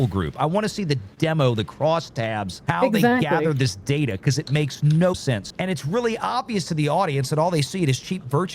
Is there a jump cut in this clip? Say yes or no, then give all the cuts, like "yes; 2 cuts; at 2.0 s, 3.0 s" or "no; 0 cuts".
yes; 2 cuts; at 2.6 s, 5.1 s